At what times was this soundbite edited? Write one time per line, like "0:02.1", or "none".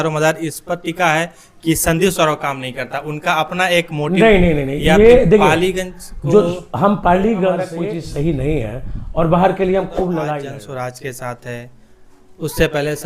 0:07.7
0:10.5